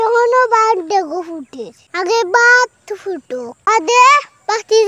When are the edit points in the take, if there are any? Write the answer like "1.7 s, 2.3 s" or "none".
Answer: none